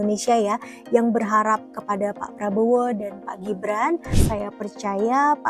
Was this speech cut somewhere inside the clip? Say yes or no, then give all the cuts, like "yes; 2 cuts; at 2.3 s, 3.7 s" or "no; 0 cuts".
yes; 1 cut; at 4.1 s